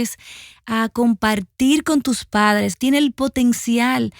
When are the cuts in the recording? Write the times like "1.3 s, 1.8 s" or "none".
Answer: 2.7 s